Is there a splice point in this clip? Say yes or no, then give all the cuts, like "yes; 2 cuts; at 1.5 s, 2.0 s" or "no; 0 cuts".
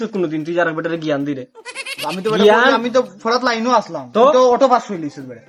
no; 0 cuts